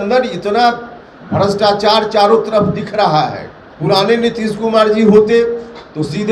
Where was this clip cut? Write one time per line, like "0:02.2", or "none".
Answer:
0:03.6